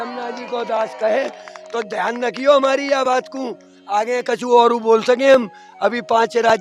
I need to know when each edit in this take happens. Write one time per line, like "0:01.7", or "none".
none

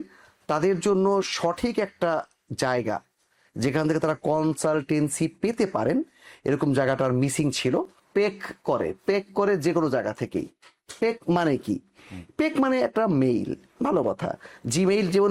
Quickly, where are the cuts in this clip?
0:08.0

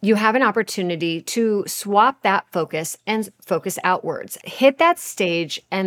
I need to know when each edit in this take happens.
0:04.3

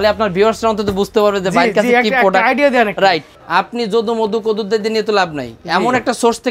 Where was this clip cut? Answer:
0:03.4

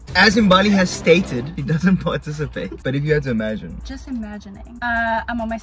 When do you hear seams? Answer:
0:01.5
0:04.8

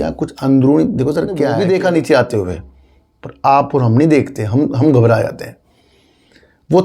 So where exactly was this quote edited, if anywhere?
0:01.5

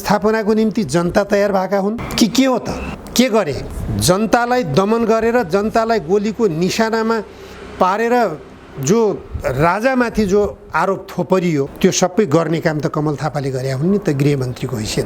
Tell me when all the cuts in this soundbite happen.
0:02.1
0:02.9
0:03.7
0:11.7

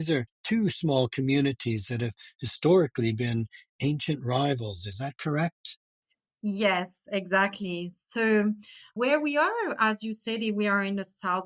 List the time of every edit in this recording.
none

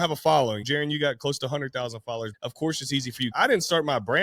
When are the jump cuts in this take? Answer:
0:02.3
0:03.3

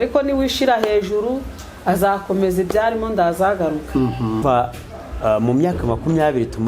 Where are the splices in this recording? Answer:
0:04.4

